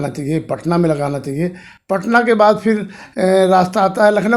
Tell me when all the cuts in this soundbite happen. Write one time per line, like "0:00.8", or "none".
none